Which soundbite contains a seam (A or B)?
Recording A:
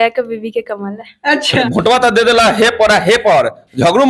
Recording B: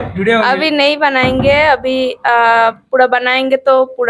A